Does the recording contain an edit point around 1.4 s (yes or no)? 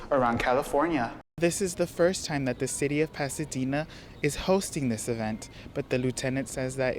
yes